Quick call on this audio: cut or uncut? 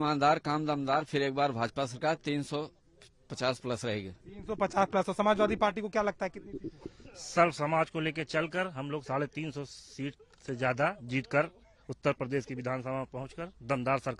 uncut